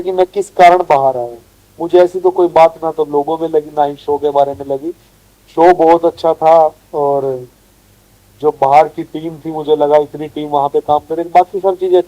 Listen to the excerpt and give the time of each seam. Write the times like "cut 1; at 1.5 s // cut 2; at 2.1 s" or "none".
none